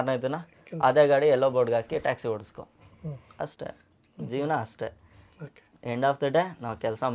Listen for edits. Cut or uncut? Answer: uncut